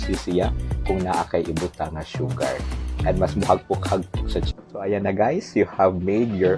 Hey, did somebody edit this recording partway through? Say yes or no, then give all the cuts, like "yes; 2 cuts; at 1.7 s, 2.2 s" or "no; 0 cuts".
yes; 1 cut; at 4.5 s